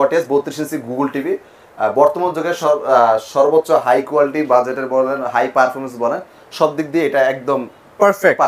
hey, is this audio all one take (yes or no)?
yes